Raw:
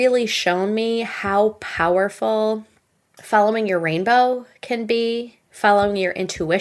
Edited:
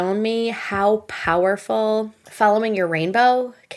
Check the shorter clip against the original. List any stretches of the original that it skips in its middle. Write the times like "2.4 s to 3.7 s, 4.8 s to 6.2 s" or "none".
2.7 s to 3.1 s